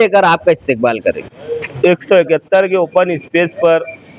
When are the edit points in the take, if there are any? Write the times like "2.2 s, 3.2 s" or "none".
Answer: 1.6 s

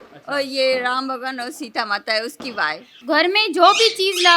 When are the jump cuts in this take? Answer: 2.9 s

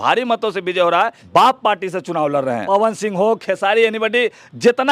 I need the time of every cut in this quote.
1.2 s, 2.6 s

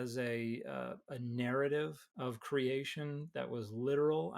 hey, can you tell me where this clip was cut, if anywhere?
2.0 s

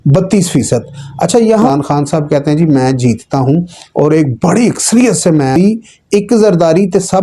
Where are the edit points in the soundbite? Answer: 1.7 s, 5.5 s

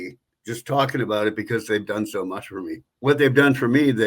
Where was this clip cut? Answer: 2.9 s

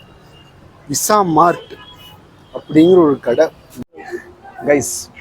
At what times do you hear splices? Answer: 3.8 s

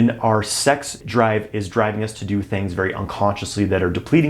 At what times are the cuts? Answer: 0.9 s

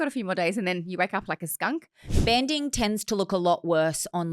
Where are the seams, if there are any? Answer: 2.2 s

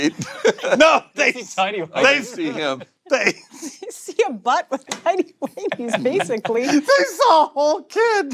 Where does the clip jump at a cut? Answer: none

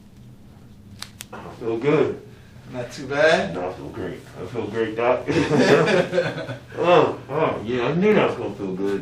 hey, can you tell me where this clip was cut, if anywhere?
1.5 s

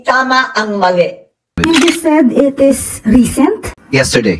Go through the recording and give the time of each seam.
1.6 s

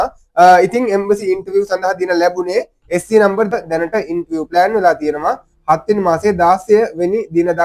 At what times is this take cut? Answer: 3.5 s

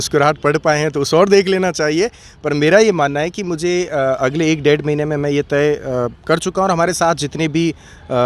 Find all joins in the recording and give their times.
none

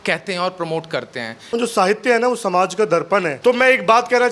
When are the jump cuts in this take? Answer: 1.5 s, 3.3 s

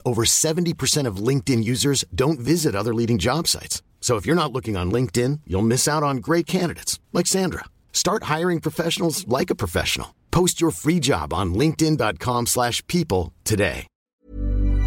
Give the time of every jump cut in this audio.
13.9 s

